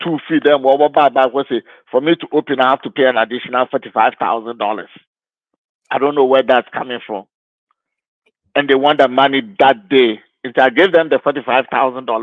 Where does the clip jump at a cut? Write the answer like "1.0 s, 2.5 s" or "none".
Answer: none